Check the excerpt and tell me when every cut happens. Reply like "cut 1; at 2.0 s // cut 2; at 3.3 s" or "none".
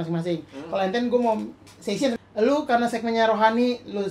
cut 1; at 2.1 s